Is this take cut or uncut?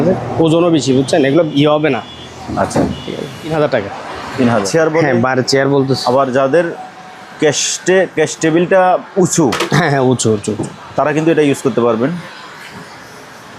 cut